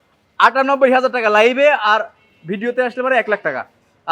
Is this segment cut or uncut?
uncut